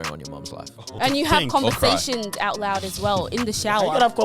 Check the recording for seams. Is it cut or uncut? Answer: cut